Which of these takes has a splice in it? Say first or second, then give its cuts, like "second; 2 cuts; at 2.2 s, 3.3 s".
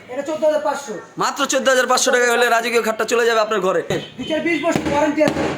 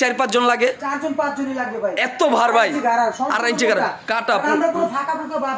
first; 1 cut; at 4.1 s